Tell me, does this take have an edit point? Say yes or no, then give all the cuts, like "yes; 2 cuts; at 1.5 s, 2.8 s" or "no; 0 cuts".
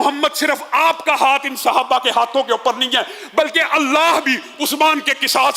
no; 0 cuts